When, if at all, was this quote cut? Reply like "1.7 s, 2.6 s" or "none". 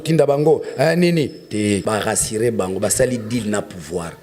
1.8 s